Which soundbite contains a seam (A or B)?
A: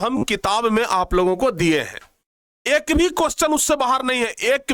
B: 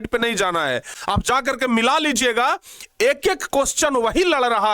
B